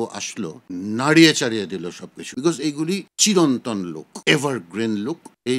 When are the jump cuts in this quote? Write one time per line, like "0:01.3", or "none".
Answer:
none